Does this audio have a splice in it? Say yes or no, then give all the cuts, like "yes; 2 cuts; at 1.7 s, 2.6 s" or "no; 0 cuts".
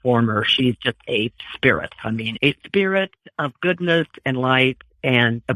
no; 0 cuts